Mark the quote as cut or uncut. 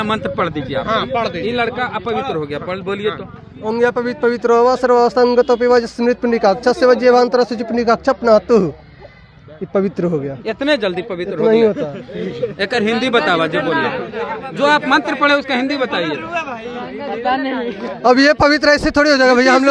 uncut